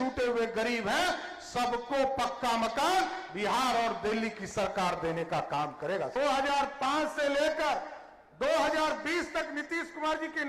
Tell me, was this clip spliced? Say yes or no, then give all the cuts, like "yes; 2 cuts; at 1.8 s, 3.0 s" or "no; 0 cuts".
yes; 1 cut; at 6.1 s